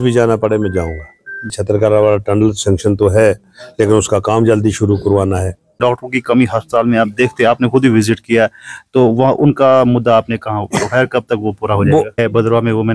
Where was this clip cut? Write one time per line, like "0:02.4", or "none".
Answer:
0:01.5
0:05.8
0:12.1

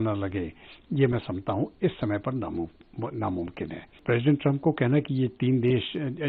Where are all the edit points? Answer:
0:04.0

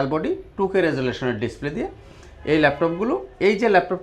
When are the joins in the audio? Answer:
none

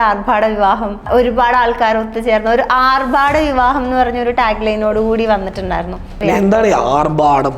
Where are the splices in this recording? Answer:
0:01.1
0:06.0

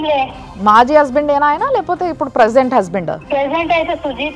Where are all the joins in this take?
0:03.2

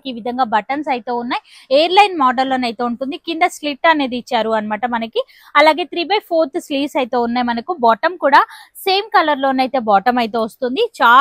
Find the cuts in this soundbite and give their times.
none

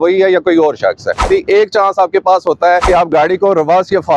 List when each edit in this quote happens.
0:01.2
0:02.8

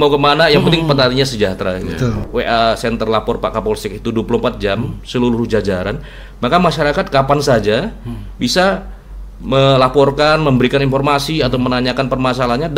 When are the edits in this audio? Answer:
0:02.2

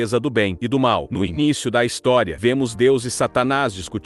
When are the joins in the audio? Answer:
none

